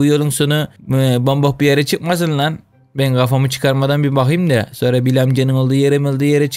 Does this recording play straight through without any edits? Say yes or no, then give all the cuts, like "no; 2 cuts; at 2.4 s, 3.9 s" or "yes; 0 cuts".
yes; 0 cuts